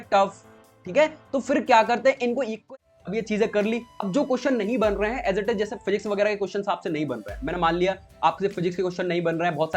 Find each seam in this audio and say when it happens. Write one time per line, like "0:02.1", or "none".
0:02.7